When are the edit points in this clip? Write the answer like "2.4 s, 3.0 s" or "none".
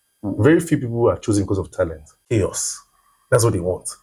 2.1 s